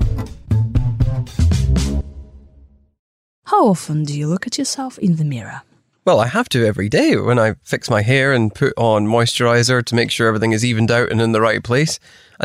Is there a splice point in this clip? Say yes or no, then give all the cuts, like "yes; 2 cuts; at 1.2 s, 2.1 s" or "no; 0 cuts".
yes; 1 cut; at 3.2 s